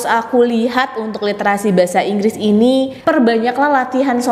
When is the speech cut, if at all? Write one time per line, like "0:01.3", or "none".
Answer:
0:02.9